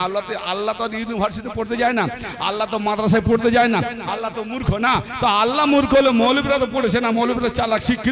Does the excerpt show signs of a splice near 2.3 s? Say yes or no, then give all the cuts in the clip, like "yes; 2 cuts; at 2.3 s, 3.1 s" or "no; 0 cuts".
no; 0 cuts